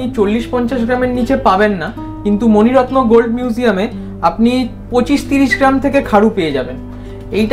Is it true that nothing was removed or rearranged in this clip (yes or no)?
yes